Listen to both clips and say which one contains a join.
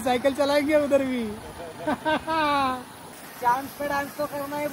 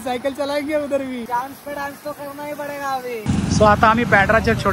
second; 2 cuts; at 1.3 s, 3.2 s

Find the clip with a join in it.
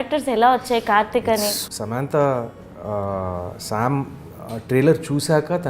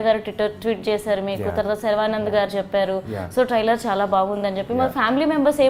first; 1 cut; at 1.6 s

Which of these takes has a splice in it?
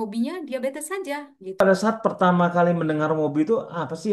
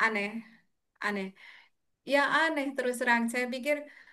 first; 1 cut; at 1.6 s

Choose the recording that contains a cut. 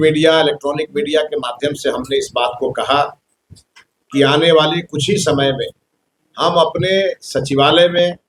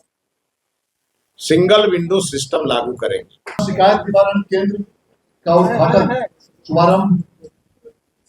second; 1 cut; at 3.5 s

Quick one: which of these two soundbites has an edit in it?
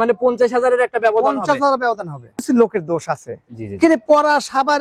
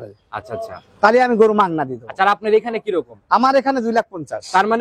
first; 1 cut; at 2.4 s

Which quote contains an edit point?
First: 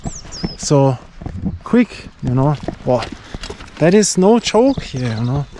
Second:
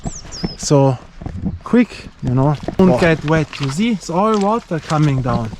second; 1 cut; at 2.8 s

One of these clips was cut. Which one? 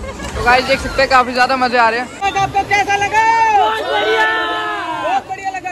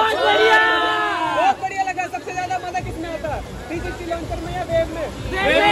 first; 1 cut; at 2.1 s

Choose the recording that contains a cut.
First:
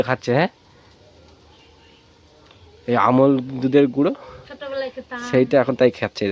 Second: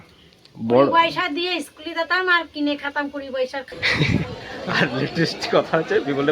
second; 1 cut; at 3.7 s

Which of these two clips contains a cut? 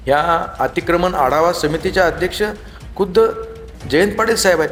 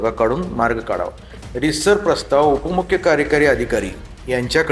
second; 1 cut; at 1.4 s

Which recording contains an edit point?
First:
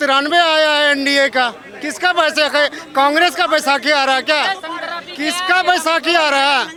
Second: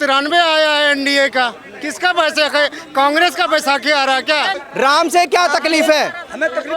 second; 1 cut; at 4.6 s

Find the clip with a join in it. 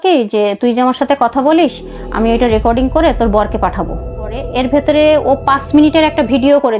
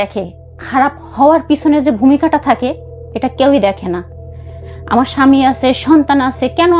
first; 1 cut; at 4.4 s

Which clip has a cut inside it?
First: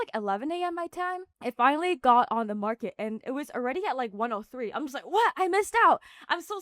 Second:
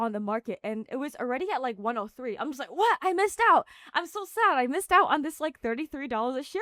first; 1 cut; at 1.3 s

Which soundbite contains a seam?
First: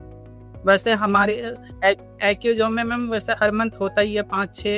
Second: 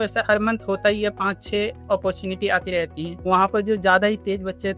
second; 1 cut; at 3.1 s

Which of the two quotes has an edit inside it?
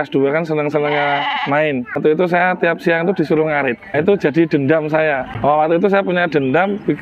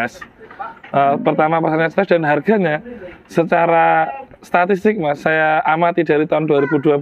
first; 3 cuts; at 2.0 s, 3.9 s, 5.3 s

